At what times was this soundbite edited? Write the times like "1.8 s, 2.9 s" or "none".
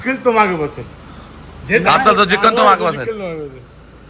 none